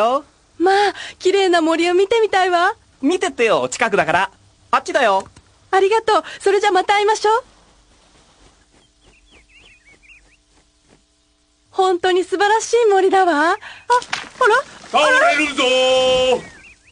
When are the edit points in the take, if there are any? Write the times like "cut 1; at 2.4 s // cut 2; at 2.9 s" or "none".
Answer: cut 1; at 2.6 s